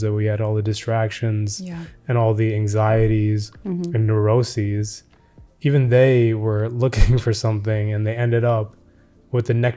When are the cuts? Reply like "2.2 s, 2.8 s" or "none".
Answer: none